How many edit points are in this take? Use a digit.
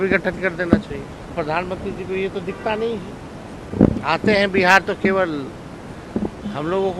2